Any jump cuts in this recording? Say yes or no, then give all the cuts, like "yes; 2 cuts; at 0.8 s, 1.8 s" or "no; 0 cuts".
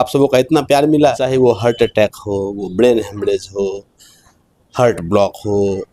yes; 1 cut; at 1.2 s